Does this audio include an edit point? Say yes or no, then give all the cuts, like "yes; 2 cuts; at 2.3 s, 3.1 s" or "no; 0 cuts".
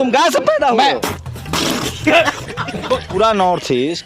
yes; 2 cuts; at 1.0 s, 3.1 s